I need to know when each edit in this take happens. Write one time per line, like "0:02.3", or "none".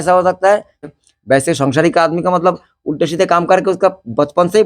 0:01.0